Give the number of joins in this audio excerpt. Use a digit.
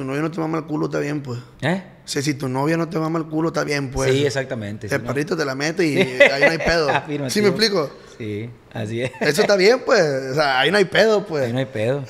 0